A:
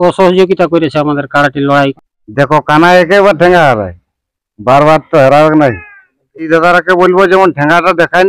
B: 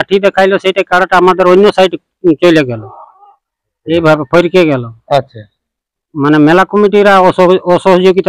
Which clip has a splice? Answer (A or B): A